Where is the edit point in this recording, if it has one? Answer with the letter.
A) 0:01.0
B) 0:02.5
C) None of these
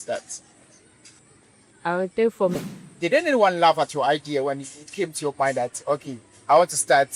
B